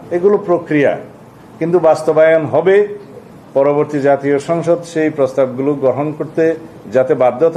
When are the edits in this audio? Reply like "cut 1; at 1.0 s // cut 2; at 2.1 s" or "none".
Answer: none